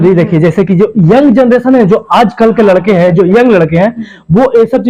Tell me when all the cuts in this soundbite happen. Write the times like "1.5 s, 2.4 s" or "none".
none